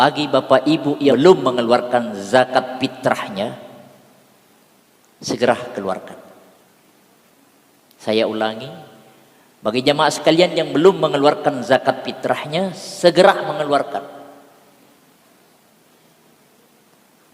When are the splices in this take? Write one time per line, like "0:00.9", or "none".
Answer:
0:01.1